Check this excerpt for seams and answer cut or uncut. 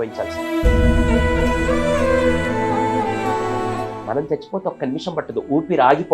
uncut